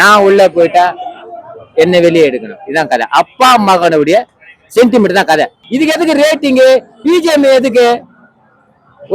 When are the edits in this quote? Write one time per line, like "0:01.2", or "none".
0:05.6